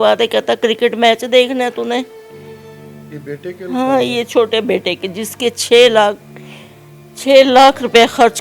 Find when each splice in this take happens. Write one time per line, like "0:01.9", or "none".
none